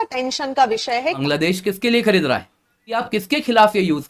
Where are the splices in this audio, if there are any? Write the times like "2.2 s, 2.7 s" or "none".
1.2 s, 3.0 s